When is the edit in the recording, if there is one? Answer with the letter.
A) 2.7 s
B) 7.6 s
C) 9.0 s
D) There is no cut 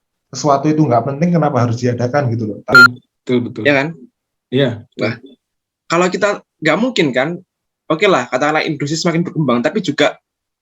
A